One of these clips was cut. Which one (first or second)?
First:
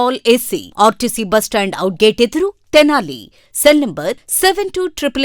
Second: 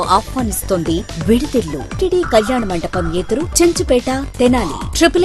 second